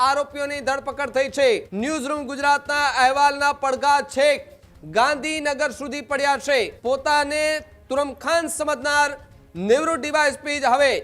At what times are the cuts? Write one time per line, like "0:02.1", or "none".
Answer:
0:01.7
0:06.8